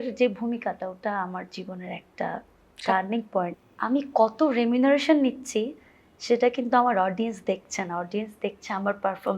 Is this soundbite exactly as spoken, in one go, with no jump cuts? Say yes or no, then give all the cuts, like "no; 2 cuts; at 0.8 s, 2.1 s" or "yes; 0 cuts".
no; 1 cut; at 3.6 s